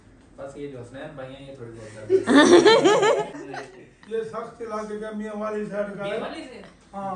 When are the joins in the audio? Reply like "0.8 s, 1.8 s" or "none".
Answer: 3.4 s